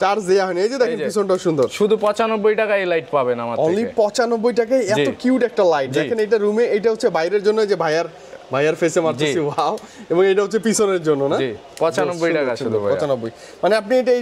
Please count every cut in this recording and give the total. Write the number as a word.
zero